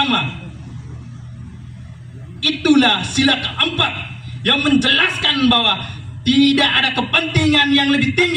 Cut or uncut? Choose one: uncut